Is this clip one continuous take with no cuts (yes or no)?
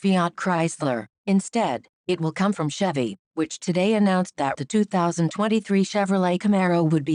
yes